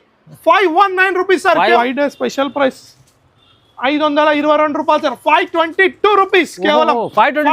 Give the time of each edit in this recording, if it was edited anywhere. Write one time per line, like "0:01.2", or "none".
0:01.8